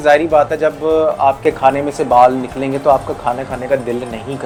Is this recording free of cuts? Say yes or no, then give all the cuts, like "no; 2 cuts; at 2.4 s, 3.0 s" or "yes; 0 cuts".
yes; 0 cuts